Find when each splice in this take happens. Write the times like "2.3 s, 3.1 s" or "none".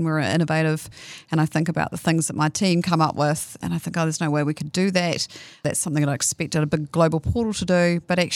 3.6 s, 5.6 s